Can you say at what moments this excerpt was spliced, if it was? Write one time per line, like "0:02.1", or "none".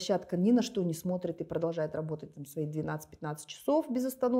none